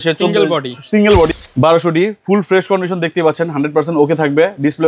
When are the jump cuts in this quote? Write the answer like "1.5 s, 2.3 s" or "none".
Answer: 1.3 s